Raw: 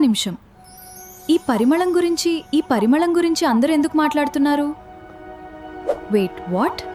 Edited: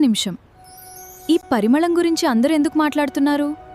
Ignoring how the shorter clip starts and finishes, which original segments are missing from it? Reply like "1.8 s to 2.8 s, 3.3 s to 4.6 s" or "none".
1.5 s to 2.6 s